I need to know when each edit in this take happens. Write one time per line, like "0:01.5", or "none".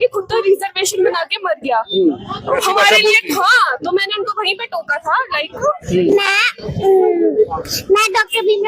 0:05.6